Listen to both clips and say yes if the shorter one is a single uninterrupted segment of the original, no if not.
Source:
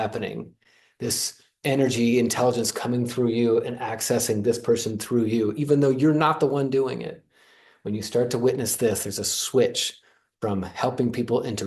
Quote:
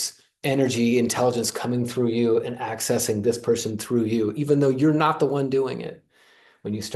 yes